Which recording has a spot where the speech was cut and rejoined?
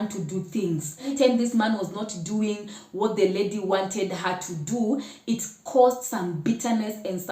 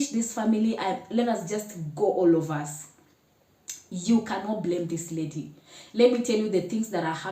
first; 1 cut; at 1.1 s

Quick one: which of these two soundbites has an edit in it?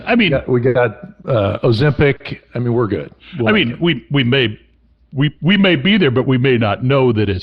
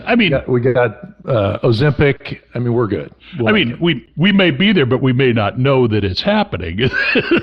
second; 1 cut; at 4.1 s

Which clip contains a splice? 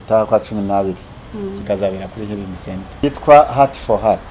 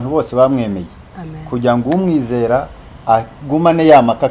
first; 1 cut; at 2.9 s

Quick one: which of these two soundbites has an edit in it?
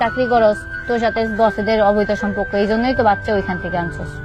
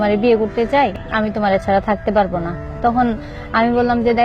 second; 1 cut; at 1.0 s

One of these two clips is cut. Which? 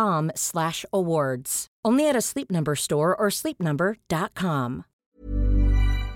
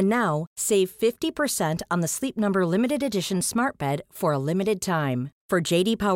first; 1 cut; at 4.8 s

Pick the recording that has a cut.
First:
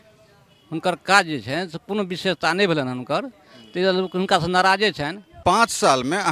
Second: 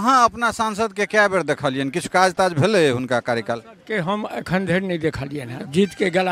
first; 1 cut; at 5.3 s

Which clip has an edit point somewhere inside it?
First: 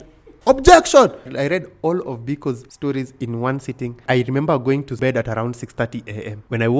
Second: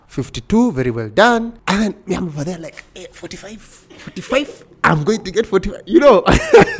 first; 4 cuts; at 1.3 s, 2.7 s, 4.0 s, 5.0 s

